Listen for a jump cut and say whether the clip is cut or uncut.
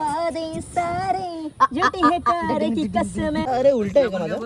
cut